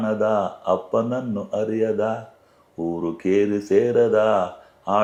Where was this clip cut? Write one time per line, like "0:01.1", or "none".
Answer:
none